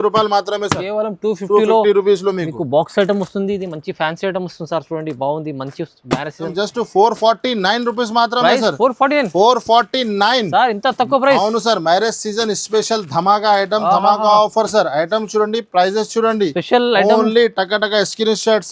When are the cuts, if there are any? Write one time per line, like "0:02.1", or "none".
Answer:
0:06.5